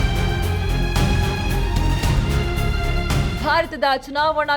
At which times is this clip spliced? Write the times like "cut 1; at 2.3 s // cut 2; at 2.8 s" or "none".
cut 1; at 2.0 s